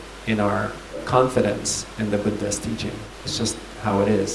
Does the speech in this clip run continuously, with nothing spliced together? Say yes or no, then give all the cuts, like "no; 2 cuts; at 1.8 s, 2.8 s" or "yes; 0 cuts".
no; 2 cuts; at 1.0 s, 3.0 s